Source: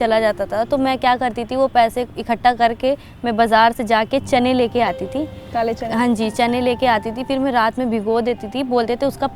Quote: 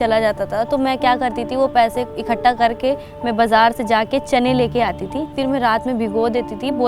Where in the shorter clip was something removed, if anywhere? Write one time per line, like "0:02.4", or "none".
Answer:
0:05.3